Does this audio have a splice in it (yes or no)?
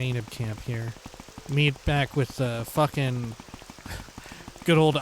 yes